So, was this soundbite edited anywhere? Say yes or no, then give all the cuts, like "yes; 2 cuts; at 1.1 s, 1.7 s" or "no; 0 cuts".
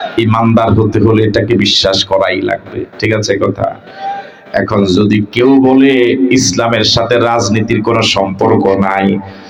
no; 0 cuts